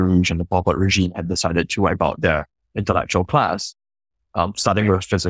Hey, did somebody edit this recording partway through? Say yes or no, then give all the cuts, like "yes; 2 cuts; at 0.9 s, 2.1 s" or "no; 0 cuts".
yes; 1 cut; at 4.3 s